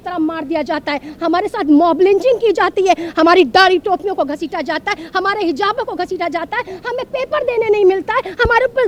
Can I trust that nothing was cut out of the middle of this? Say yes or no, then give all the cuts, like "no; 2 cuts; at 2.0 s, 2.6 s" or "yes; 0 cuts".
yes; 0 cuts